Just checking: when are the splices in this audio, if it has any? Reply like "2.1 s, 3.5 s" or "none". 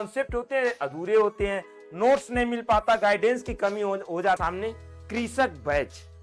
4.4 s

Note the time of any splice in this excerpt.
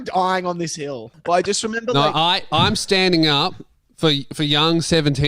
1.1 s

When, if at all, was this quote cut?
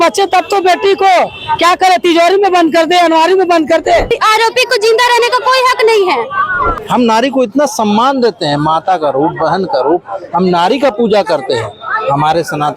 4.1 s, 6.7 s

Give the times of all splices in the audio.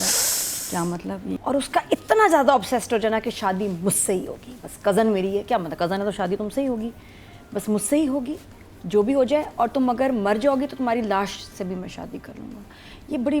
1.4 s

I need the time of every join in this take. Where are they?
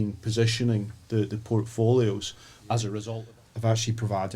3.1 s

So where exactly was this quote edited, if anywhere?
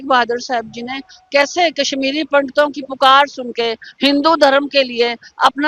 none

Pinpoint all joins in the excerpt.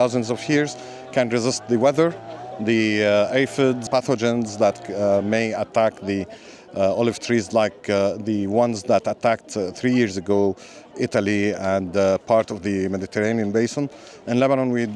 3.8 s

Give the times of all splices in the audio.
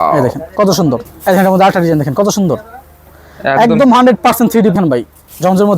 1.1 s, 4.7 s

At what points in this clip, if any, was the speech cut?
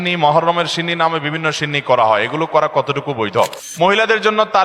3.6 s

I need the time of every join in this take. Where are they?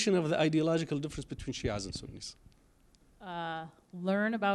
3.3 s

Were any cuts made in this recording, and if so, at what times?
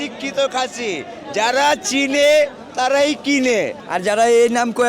3.8 s

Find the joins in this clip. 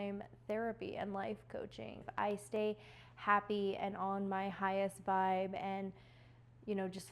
2.1 s

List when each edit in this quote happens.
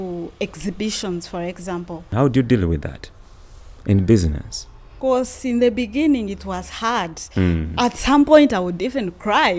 2.1 s

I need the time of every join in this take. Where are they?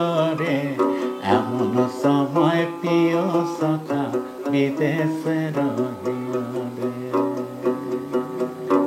none

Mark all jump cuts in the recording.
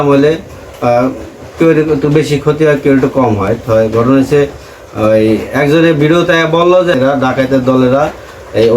6.9 s

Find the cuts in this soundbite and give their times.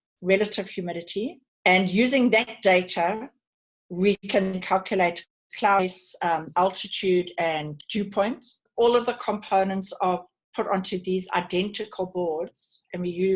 1.4 s, 7.7 s, 8.7 s

